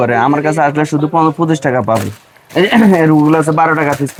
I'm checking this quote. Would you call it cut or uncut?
uncut